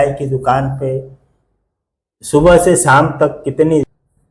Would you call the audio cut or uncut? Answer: uncut